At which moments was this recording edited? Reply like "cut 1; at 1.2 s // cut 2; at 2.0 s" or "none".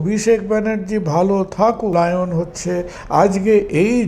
cut 1; at 1.9 s